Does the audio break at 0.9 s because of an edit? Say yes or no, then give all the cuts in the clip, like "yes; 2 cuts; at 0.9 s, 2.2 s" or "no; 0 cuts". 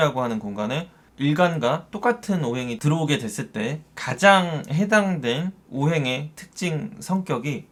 no; 0 cuts